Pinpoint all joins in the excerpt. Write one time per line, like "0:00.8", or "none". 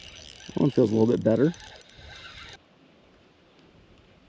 0:02.6